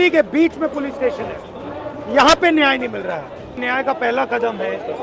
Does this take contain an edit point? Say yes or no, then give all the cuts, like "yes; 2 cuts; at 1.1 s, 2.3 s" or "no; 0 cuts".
yes; 1 cut; at 3.6 s